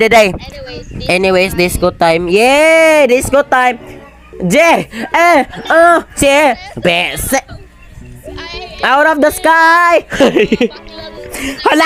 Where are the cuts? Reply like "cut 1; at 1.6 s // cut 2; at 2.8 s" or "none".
none